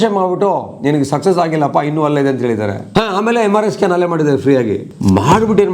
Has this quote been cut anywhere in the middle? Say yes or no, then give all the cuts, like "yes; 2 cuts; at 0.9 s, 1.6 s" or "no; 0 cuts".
yes; 2 cuts; at 2.8 s, 4.9 s